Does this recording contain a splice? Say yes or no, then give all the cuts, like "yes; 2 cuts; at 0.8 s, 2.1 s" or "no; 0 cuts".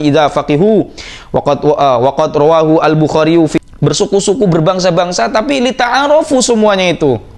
yes; 1 cut; at 3.6 s